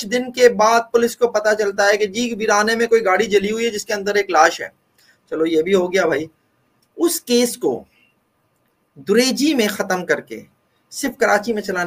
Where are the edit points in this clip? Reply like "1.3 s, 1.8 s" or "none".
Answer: none